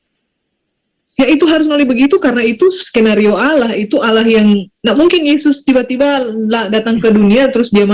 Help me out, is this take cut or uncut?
uncut